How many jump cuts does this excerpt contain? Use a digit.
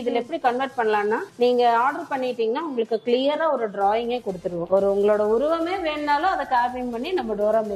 1